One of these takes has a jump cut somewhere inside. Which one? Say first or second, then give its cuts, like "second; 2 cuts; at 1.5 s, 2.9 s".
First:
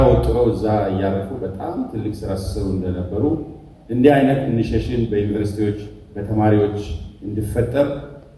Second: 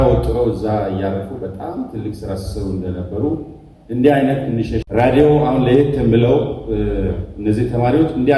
second; 1 cut; at 4.8 s